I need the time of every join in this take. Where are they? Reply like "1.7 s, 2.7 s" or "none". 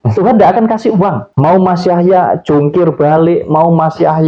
1.3 s